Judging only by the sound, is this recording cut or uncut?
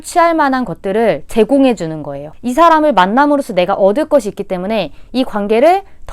cut